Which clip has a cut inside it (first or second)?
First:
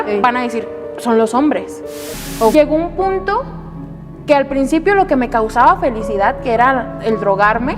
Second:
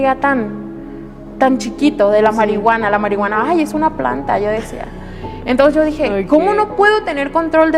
first